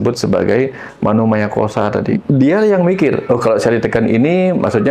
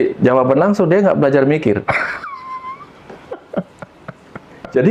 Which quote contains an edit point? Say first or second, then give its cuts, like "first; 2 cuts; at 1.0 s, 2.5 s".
first; 1 cut; at 2.2 s